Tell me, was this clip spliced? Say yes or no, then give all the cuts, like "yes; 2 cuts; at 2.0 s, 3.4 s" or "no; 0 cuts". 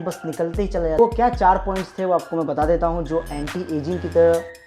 yes; 1 cut; at 1.0 s